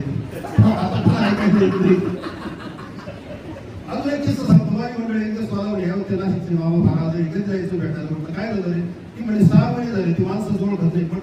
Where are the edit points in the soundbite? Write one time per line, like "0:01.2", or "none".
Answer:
none